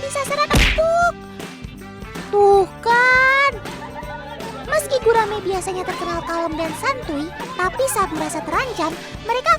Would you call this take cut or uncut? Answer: cut